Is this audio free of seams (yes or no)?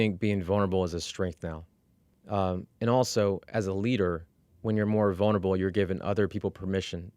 yes